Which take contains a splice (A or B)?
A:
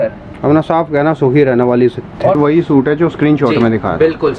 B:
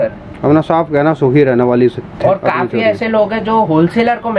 A